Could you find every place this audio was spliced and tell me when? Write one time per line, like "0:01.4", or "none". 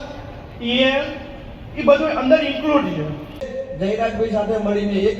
0:03.6